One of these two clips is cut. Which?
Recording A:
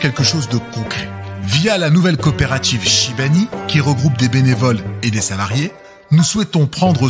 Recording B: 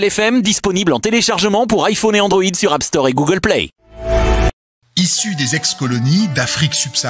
B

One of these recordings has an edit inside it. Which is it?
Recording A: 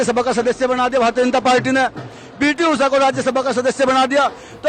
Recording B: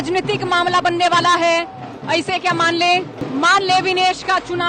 B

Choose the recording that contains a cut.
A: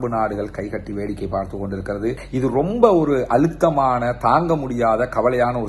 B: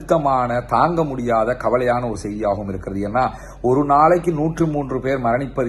A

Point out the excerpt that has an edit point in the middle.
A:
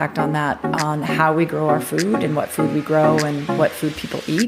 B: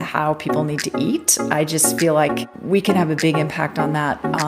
B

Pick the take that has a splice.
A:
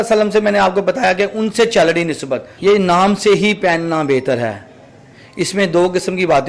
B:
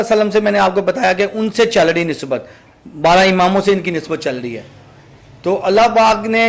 A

